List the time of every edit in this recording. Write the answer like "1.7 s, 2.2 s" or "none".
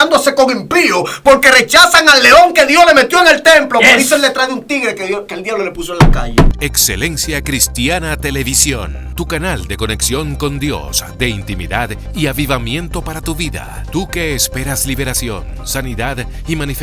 6.7 s

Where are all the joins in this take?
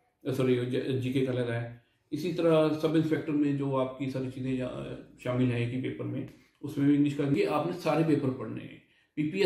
7.3 s

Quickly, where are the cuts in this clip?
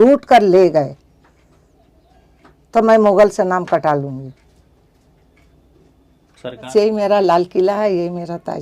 6.7 s

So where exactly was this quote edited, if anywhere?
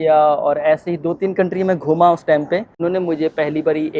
2.8 s

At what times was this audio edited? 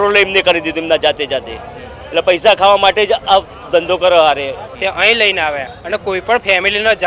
4.7 s

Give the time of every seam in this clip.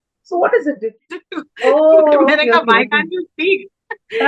0.9 s

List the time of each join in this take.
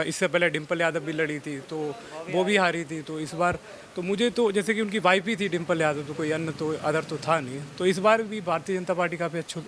none

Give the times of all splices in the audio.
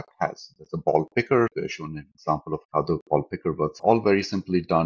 1.5 s, 3.8 s

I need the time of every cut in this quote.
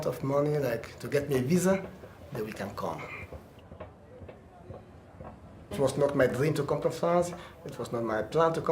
1.7 s

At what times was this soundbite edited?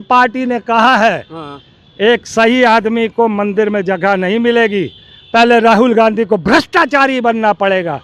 none

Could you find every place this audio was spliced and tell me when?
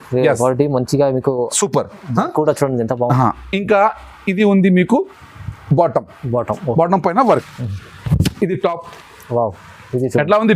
7.2 s

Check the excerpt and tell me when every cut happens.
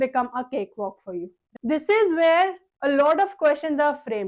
1.5 s

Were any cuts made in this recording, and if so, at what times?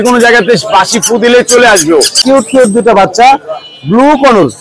2.2 s

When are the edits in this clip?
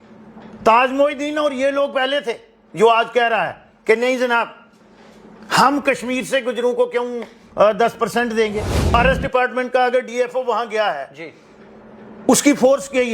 8.9 s

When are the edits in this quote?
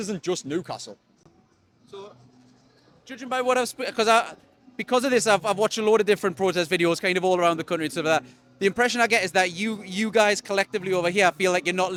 none

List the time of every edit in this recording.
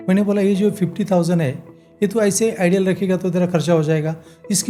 none

